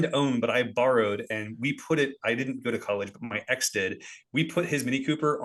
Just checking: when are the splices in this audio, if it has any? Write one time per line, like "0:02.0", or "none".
none

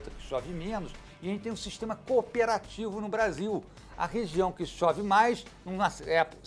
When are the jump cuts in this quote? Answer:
none

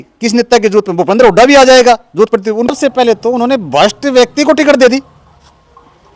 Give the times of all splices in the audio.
0:02.8

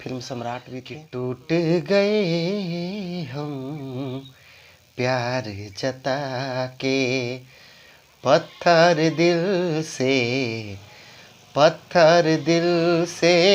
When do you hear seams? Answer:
0:01.0

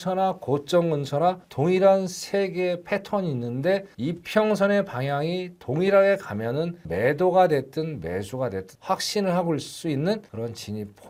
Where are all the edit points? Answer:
none

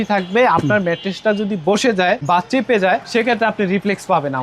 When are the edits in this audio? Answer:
0:02.2

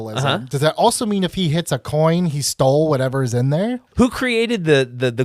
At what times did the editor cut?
0:03.9

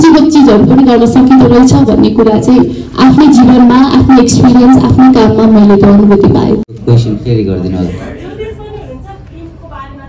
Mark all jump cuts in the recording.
0:06.6

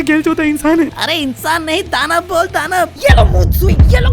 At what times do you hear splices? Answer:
0:02.9

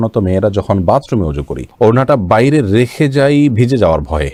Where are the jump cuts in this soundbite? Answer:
none

